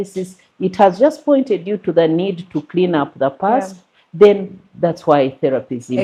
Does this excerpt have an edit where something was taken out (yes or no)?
no